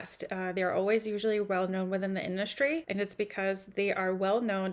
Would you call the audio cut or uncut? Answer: cut